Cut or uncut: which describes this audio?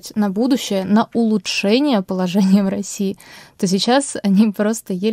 uncut